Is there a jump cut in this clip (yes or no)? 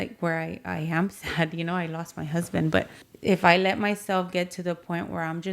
yes